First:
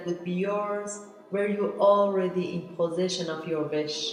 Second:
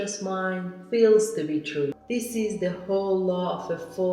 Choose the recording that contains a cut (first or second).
second